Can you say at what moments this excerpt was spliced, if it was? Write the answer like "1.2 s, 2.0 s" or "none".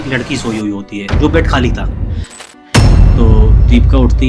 2.4 s